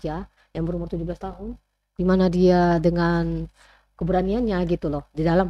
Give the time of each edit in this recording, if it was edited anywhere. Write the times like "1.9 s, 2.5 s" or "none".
none